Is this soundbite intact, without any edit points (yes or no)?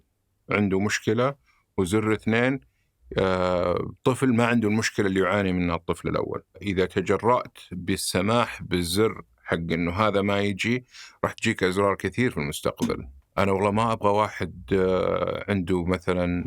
no